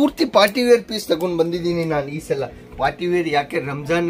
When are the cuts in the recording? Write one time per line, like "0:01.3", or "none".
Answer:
none